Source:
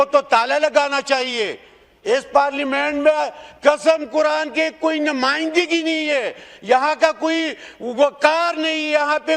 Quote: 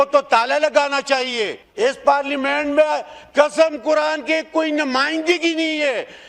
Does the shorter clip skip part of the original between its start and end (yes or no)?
yes